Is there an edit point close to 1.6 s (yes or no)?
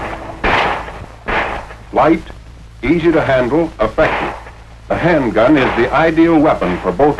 no